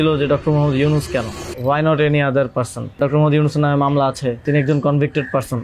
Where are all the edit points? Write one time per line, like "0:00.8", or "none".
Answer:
0:01.4
0:03.0
0:04.4